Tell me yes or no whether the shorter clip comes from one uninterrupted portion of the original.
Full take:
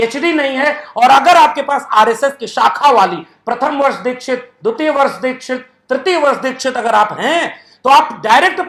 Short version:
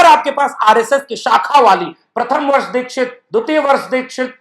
yes